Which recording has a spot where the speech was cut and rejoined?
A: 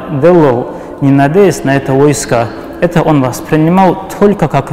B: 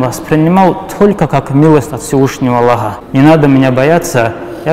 B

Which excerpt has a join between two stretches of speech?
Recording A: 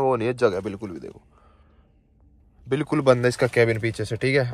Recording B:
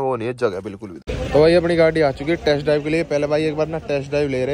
B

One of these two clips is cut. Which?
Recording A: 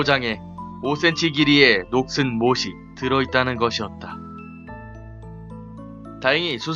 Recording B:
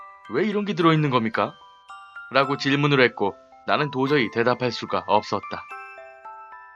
A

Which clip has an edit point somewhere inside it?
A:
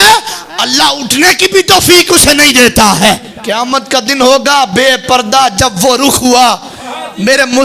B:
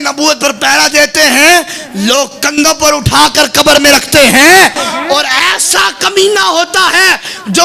A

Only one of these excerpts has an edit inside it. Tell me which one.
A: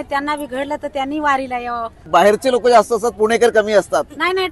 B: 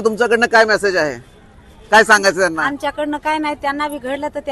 A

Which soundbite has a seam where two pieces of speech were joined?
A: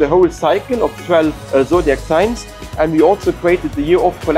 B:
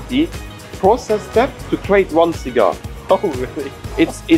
B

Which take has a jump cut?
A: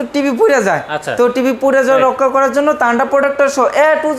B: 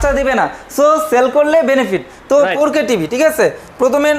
B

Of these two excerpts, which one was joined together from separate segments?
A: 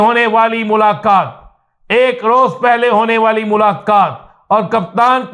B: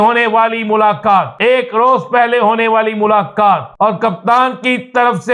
B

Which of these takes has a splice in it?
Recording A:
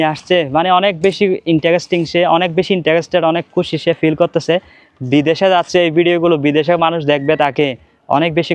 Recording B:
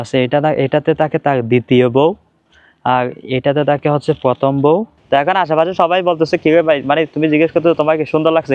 B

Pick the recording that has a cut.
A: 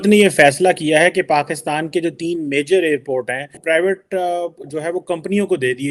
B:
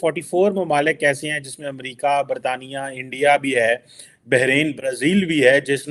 A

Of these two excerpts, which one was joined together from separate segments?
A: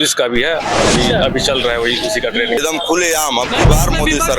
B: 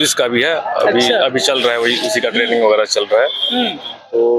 A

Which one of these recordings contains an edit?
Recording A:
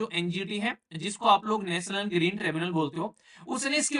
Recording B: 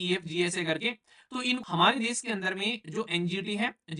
B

